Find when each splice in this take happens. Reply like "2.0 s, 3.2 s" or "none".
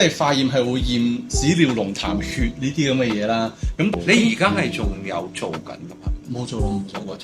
3.9 s